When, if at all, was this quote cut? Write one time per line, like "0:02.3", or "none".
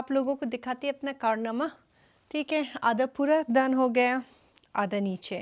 none